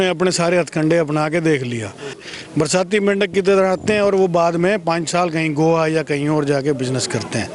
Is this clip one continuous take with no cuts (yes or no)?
no